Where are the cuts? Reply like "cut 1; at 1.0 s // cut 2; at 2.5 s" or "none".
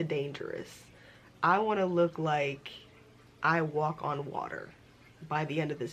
none